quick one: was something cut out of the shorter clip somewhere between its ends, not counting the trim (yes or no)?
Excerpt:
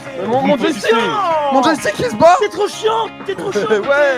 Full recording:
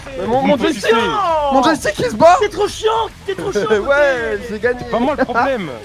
no